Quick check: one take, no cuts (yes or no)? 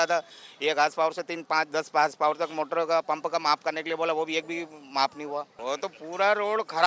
no